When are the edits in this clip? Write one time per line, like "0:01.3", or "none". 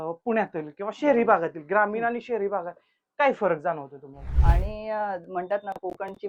0:04.3